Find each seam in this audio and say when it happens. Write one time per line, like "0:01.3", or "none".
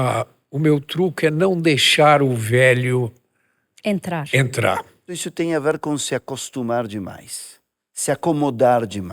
0:05.2